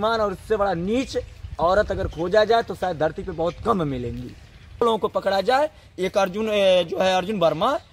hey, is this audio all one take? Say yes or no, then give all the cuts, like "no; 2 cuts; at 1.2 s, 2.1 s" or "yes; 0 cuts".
no; 1 cut; at 4.8 s